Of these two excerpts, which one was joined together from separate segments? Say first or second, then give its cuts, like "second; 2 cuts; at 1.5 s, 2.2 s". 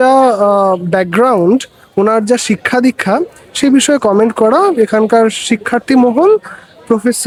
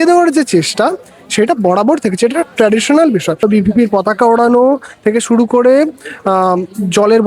second; 1 cut; at 3.4 s